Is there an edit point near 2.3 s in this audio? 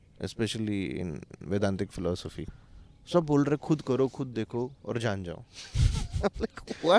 yes; 1 cut; at 2.3 s

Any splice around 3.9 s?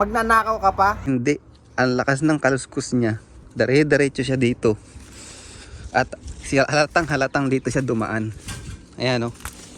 no; 1 cut; at 1.0 s

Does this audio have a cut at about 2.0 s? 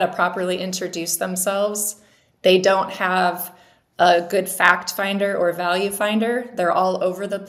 no; 0 cuts

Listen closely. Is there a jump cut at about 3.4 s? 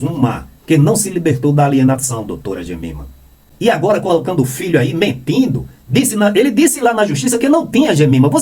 yes; 1 cut; at 3.4 s

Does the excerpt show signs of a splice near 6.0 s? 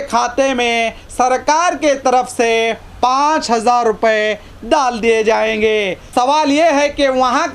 yes; 1 cut; at 6.0 s

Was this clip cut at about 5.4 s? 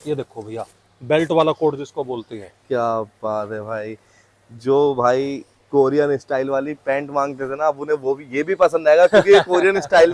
no; 0 cuts

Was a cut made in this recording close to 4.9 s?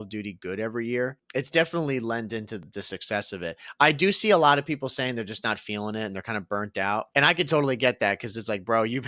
no; 3 cuts; at 1.2 s, 2.6 s, 7.1 s

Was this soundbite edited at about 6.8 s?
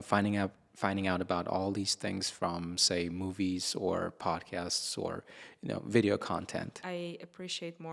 yes; 1 cut; at 6.8 s

